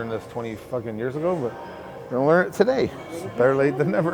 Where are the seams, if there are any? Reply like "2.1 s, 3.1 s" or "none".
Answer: none